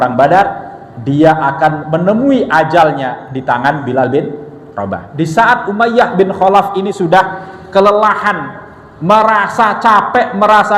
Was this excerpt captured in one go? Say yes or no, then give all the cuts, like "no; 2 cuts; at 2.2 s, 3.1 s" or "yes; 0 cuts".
no; 1 cut; at 5.0 s